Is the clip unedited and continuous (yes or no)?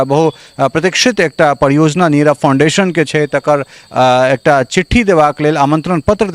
yes